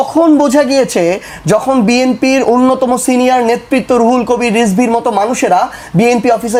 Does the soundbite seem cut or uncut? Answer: uncut